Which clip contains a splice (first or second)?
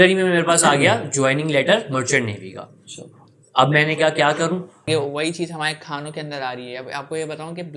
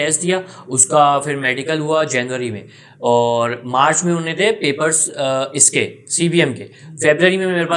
first